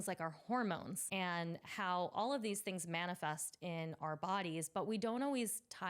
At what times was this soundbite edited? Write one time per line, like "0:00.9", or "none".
0:01.0